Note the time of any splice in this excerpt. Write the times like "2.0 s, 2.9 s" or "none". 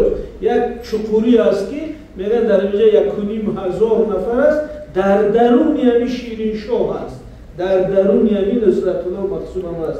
none